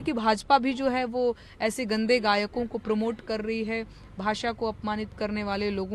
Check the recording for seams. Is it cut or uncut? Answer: uncut